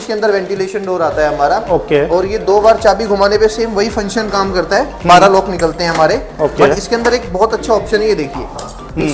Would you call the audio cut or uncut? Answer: uncut